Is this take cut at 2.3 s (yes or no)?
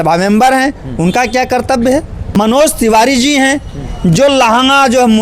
yes